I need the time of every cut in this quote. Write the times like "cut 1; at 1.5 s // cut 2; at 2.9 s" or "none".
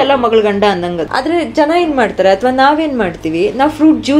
cut 1; at 1.0 s